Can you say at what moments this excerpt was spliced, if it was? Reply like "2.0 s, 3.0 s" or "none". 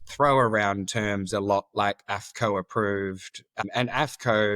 3.6 s